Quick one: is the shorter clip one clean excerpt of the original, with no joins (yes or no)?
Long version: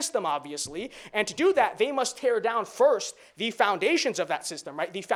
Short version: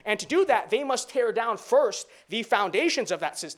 yes